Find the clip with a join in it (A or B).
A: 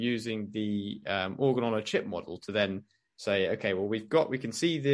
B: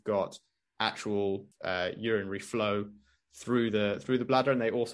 B